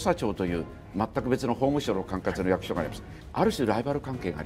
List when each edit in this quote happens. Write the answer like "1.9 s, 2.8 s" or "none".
none